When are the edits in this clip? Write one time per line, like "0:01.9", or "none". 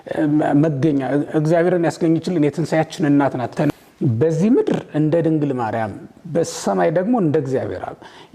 0:03.8